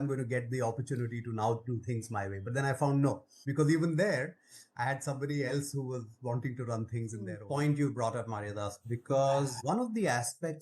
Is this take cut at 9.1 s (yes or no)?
no